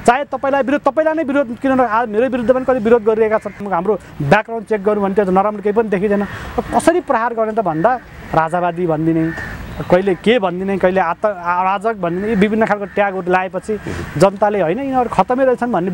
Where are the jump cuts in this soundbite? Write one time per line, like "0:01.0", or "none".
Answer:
0:03.6